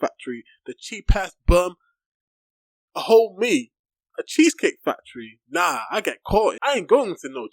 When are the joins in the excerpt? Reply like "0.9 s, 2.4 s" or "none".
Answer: 6.6 s